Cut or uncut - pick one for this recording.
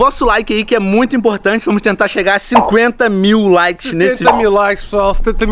uncut